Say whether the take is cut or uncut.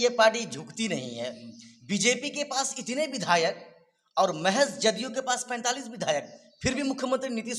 uncut